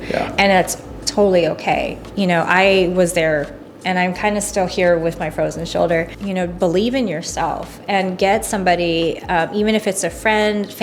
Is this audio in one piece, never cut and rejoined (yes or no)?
no